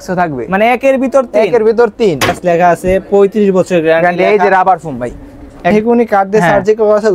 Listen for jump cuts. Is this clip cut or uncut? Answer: cut